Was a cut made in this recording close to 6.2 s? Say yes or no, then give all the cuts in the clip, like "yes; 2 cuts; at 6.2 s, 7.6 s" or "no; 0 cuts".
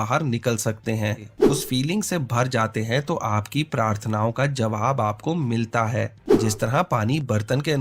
yes; 2 cuts; at 1.4 s, 6.2 s